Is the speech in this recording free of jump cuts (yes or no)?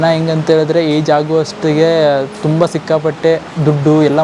yes